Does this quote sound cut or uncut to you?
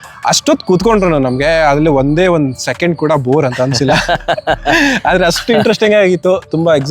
uncut